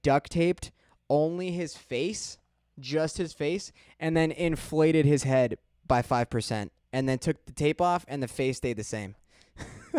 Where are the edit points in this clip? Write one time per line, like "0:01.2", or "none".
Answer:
none